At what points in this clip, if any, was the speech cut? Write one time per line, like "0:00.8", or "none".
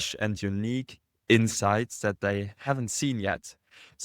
0:02.7